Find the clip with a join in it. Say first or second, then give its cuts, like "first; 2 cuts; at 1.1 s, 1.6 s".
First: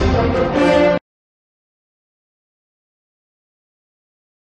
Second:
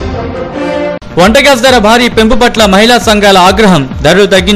second; 1 cut; at 1.0 s